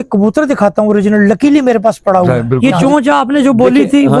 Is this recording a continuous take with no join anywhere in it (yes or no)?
no